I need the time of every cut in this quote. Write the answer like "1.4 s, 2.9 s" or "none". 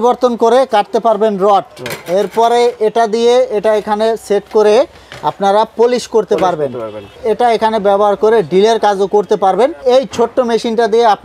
7.1 s, 9.8 s